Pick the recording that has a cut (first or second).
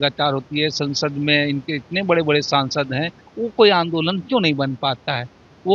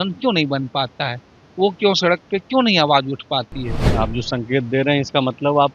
second